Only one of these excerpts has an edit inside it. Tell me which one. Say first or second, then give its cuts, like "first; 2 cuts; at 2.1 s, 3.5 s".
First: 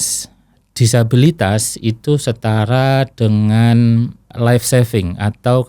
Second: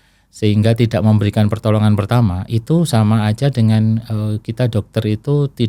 first; 1 cut; at 4.2 s